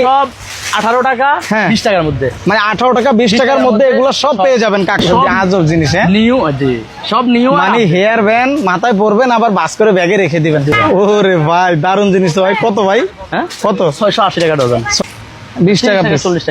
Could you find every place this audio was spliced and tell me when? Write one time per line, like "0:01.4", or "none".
0:05.0
0:10.7
0:14.9